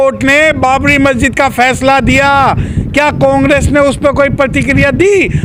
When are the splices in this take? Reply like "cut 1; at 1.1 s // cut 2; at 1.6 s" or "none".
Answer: none